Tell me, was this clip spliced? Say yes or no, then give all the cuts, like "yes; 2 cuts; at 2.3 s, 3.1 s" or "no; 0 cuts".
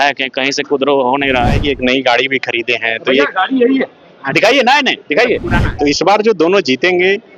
yes; 2 cuts; at 1.6 s, 5.6 s